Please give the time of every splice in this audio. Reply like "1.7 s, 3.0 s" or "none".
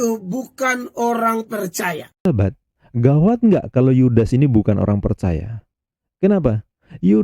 2.3 s